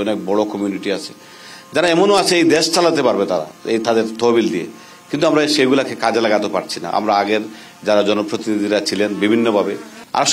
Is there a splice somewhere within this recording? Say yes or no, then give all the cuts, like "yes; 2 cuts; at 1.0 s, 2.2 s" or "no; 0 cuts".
no; 0 cuts